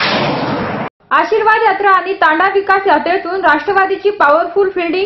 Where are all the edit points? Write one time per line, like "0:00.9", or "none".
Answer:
0:00.9